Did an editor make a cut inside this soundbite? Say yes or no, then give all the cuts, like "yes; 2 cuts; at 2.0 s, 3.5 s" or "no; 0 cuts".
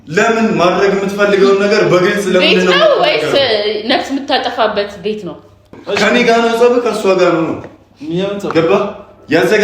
yes; 1 cut; at 5.8 s